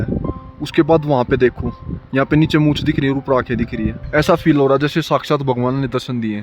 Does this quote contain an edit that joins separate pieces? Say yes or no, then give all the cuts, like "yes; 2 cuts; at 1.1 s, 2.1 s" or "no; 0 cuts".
yes; 1 cut; at 4.0 s